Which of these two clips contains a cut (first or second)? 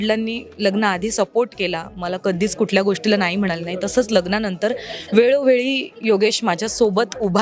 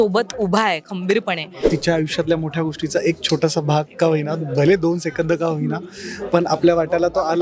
second